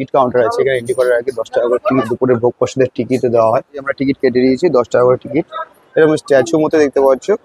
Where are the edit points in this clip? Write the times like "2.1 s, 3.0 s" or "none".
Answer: 2.0 s, 3.9 s, 5.8 s